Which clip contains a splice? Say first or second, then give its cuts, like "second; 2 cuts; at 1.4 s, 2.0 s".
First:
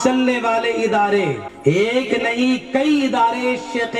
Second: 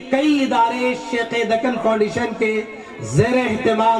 first; 1 cut; at 1.5 s